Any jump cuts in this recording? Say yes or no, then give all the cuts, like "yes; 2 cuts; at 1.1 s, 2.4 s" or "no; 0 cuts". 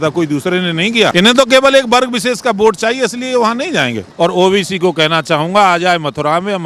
yes; 2 cuts; at 1.1 s, 4.0 s